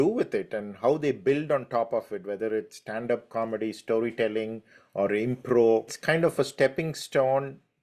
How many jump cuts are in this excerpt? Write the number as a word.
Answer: one